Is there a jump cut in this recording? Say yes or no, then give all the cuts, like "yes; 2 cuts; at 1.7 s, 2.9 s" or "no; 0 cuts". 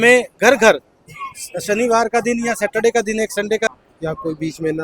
yes; 1 cut; at 3.7 s